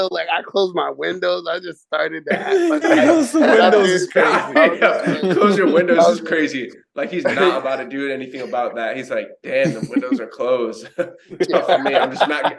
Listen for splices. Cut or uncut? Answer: uncut